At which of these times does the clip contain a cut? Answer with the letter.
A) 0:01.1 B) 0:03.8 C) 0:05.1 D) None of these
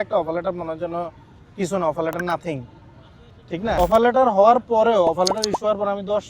B